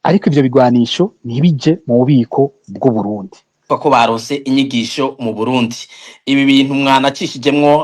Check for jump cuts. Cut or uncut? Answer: cut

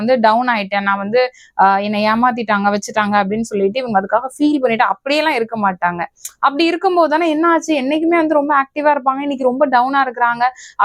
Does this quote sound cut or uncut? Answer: uncut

